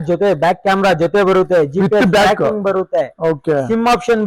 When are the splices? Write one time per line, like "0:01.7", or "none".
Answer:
none